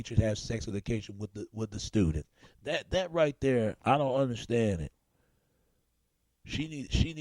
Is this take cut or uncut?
cut